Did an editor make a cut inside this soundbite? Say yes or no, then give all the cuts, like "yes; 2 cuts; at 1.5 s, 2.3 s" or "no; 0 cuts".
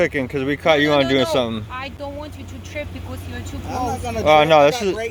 no; 0 cuts